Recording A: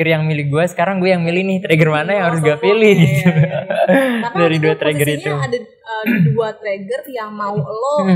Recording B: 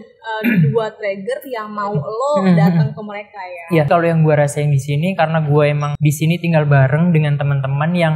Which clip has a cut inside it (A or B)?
B